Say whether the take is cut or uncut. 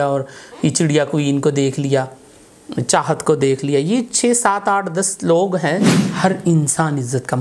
cut